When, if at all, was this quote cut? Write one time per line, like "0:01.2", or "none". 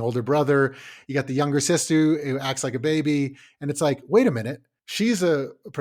0:00.9